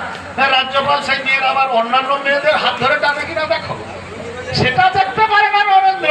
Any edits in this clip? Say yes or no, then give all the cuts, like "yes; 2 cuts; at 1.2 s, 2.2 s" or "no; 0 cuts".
no; 0 cuts